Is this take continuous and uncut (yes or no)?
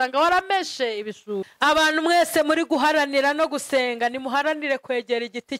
no